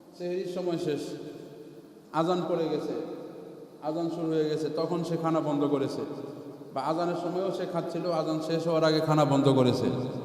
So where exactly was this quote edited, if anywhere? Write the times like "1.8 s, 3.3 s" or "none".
none